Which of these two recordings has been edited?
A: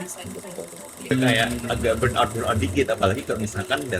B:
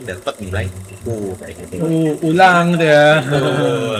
A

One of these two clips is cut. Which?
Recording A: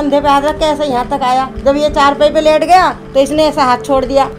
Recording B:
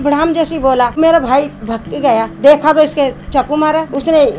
B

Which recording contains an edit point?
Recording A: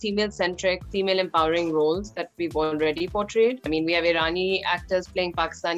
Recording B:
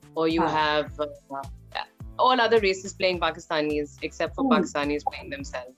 A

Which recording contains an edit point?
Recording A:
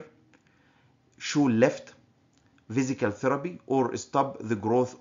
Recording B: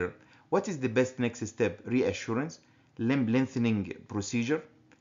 B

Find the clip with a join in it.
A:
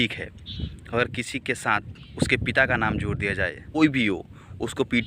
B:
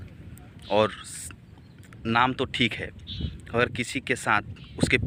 A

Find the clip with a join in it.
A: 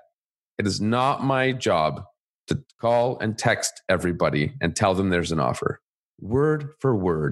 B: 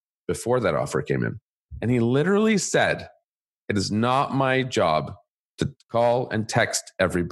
B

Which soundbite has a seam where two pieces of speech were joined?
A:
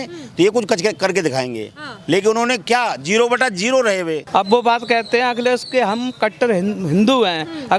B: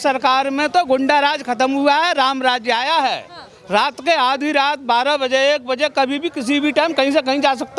A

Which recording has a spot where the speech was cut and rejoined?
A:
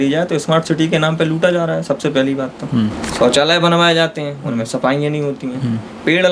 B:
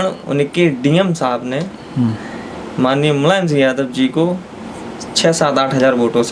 A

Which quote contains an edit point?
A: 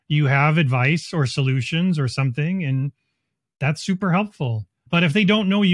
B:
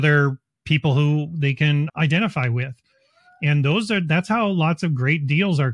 A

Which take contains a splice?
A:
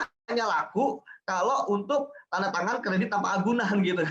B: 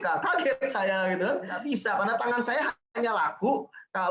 B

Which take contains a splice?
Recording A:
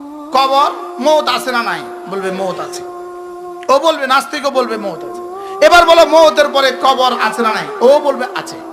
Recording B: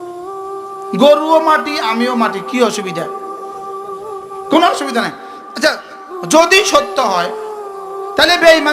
B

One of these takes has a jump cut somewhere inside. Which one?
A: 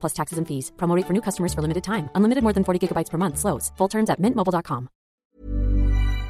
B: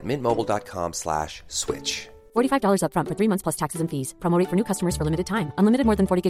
A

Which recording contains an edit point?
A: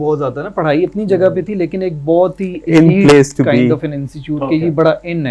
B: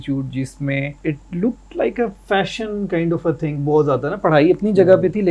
B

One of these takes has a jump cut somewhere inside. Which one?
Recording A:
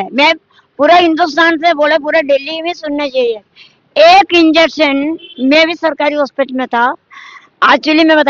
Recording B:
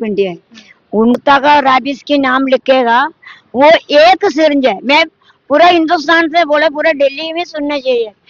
B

